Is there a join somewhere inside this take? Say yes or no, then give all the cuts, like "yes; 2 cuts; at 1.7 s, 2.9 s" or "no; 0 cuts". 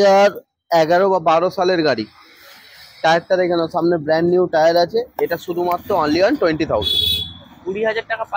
no; 0 cuts